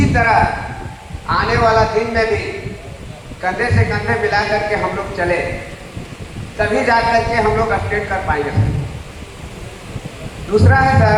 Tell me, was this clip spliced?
no; 0 cuts

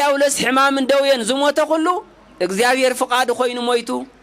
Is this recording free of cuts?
yes; 0 cuts

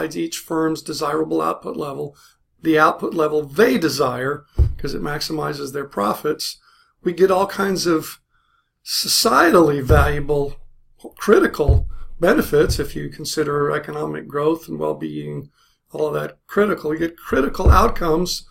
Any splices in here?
yes; 1 cut; at 9.6 s

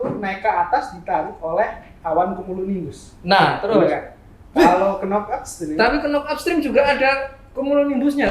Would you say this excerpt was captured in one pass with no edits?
yes; 0 cuts

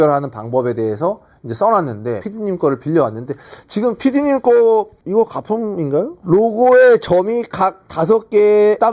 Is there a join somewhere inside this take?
yes; 1 cut; at 2.2 s

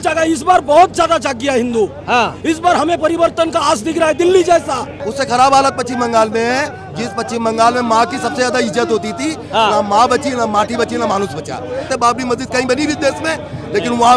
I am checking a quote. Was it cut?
yes; 2 cuts; at 5.1 s, 11.9 s

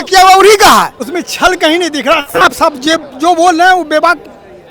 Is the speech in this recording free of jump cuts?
no; 1 cut; at 1.0 s

